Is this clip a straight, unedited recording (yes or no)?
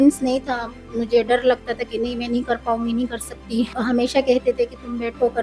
no